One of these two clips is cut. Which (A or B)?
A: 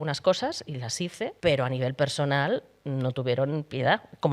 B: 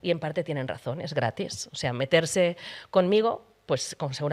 A